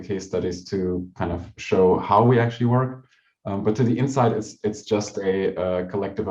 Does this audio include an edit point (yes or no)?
yes